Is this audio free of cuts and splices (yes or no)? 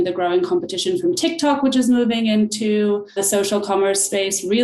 no